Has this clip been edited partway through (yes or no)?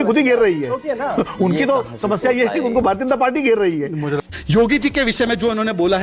yes